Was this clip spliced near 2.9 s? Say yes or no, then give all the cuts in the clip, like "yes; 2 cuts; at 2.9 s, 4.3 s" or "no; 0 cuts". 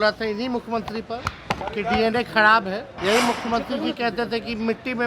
yes; 1 cut; at 2.9 s